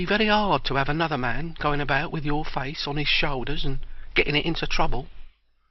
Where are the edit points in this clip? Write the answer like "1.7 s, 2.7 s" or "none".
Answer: 2.1 s